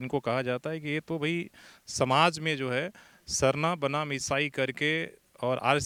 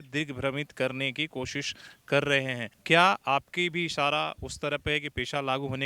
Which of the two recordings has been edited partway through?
second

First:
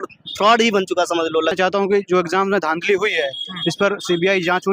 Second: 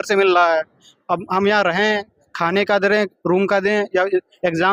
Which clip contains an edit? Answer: first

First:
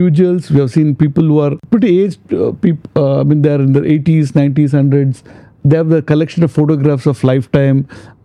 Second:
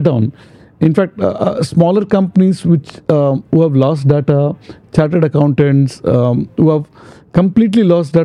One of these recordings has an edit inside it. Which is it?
first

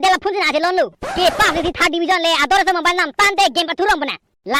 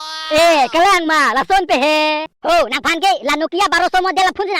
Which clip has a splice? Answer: second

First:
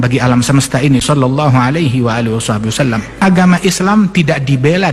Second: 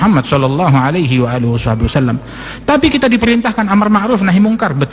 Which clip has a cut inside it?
first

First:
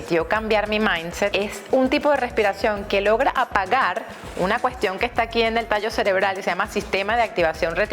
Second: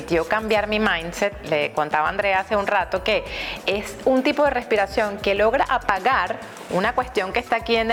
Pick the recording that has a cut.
first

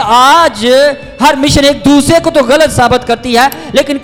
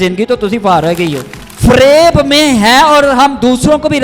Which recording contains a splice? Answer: second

